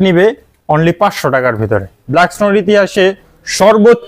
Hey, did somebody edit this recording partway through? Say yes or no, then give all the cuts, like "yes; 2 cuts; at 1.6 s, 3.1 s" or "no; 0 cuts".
yes; 1 cut; at 2.0 s